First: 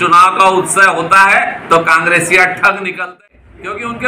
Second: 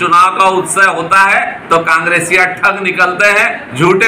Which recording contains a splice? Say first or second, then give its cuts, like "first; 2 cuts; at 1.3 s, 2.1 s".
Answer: first; 1 cut; at 3.0 s